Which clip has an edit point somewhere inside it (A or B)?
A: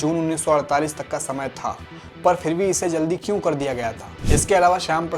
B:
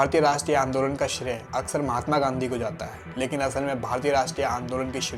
A